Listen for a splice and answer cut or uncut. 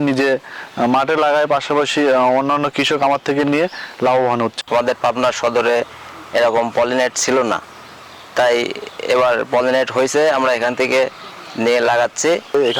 cut